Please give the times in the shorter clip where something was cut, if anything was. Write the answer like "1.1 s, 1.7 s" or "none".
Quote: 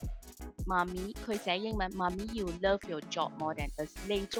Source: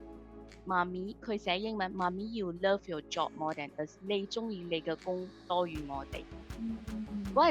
none